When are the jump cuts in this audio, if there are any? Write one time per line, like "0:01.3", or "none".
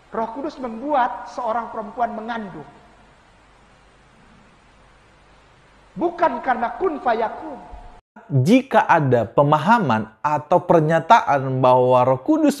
0:08.3